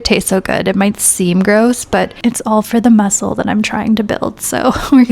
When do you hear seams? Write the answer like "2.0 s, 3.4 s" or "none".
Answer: 2.1 s